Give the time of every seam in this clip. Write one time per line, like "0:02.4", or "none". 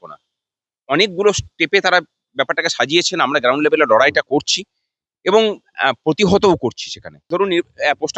0:07.3

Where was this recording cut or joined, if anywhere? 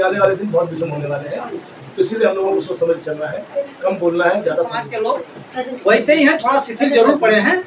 0:04.7

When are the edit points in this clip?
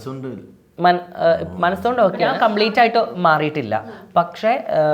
0:02.2

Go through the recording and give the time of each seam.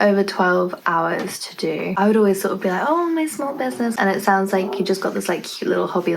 0:01.9
0:03.9

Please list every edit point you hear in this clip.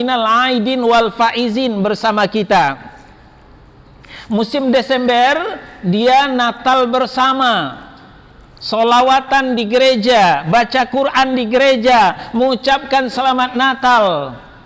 none

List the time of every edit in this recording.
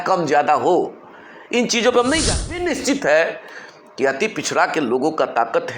0:02.7

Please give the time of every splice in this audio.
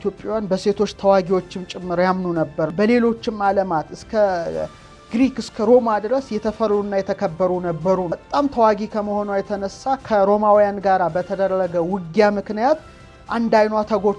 0:02.7
0:08.1

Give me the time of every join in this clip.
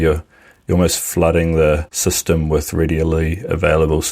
0:01.9

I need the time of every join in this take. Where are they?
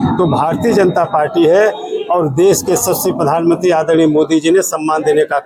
none

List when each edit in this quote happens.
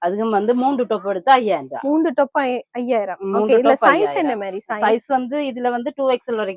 none

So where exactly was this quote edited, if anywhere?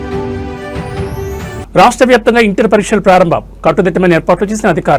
0:01.6

